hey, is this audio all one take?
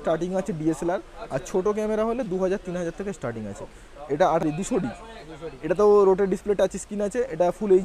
no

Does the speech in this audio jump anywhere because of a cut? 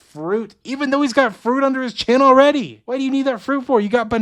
no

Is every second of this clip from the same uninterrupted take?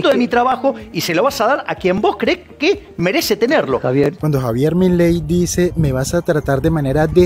yes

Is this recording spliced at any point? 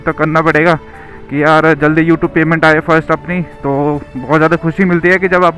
no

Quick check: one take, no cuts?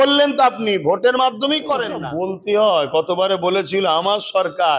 no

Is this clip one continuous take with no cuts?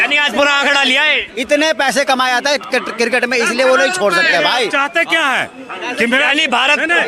yes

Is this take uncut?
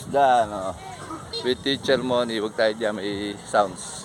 yes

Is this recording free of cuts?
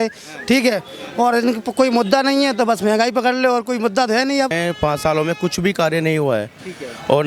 no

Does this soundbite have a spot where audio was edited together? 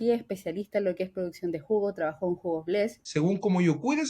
yes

